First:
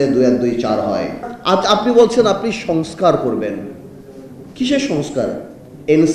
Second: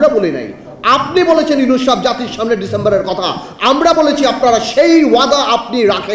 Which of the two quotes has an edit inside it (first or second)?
first